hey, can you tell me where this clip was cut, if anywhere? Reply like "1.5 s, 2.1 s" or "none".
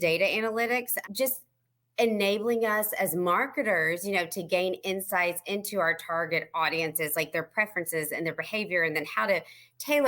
1.0 s